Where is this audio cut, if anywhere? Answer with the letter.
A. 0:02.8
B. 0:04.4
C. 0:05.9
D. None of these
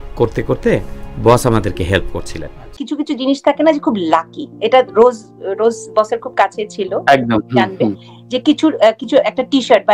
A